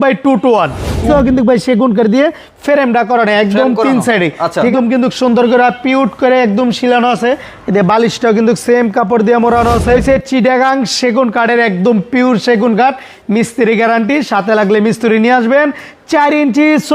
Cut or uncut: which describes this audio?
cut